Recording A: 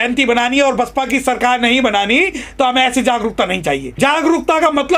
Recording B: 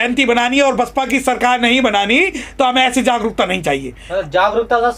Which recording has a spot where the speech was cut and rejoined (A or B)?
A